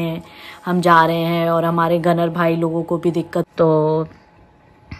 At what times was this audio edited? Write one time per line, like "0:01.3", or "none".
0:03.5